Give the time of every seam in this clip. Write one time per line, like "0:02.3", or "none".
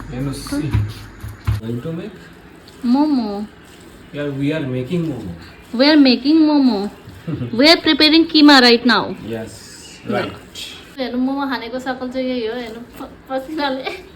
0:01.6
0:11.0